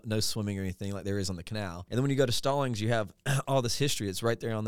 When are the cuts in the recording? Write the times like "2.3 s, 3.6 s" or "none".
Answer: 1.8 s